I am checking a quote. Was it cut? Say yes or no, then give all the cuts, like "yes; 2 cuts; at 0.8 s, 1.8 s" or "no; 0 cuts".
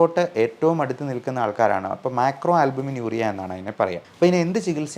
yes; 1 cut; at 4.1 s